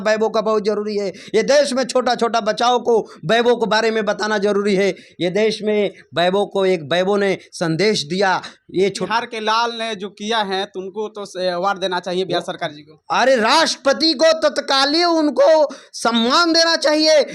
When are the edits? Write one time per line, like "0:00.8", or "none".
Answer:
0:09.0